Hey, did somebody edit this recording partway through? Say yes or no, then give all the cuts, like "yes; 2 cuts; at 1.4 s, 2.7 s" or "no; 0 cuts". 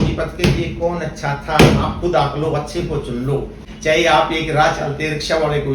yes; 1 cut; at 3.7 s